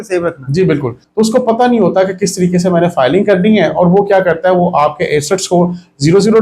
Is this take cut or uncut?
cut